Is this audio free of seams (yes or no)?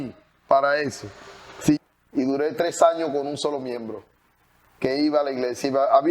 no